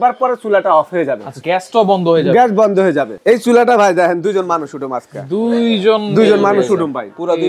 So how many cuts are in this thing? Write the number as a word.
two